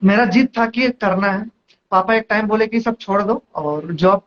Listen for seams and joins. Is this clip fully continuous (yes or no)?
yes